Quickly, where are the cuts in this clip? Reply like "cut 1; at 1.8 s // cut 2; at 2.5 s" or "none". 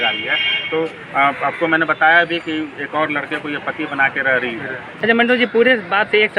cut 1; at 4.8 s